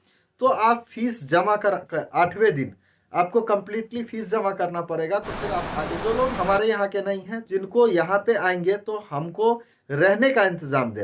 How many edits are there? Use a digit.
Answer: 1